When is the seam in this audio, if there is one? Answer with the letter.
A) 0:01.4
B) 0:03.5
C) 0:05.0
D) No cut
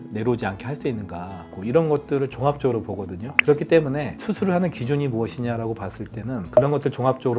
A